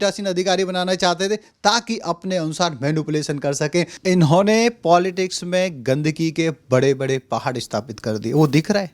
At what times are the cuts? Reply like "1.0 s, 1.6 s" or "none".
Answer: 4.0 s